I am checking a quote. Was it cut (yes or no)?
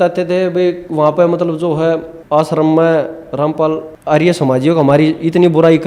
yes